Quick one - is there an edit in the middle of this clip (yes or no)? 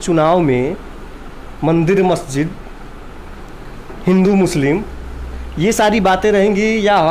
no